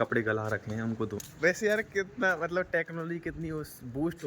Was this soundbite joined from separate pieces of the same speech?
yes; 1 cut; at 1.1 s

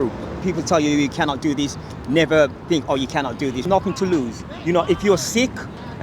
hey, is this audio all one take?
no; 1 cut; at 3.6 s

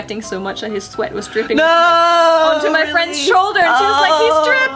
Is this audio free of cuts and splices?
yes; 0 cuts

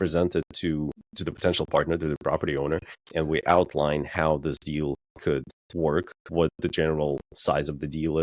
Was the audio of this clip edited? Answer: yes; 2 cuts; at 1.1 s, 3.0 s

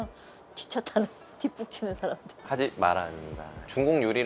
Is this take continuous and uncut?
no; 1 cut; at 2.3 s

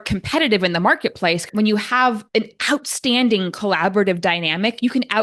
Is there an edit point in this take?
yes; 2 cuts; at 1.4 s, 2.2 s

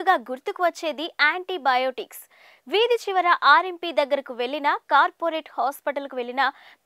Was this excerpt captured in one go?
yes; 0 cuts

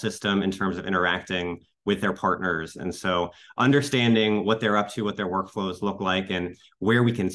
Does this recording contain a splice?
no; 0 cuts

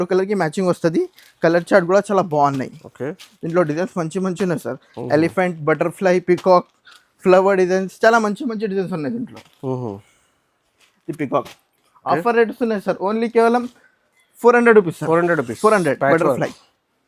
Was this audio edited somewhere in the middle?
no; 0 cuts

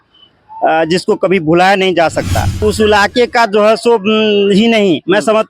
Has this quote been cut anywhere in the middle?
yes; 1 cut; at 2.6 s

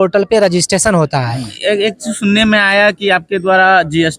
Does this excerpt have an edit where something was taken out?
yes; 1 cut; at 1.5 s

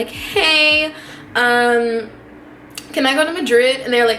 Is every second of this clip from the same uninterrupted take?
yes; 0 cuts

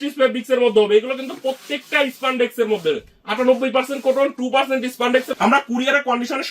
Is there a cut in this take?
yes; 1 cut; at 5.3 s

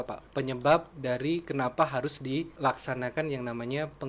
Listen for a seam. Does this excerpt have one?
yes; 2 cuts; at 0.9 s, 2.5 s

